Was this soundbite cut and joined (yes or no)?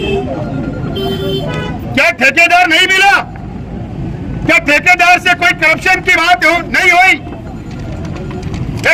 no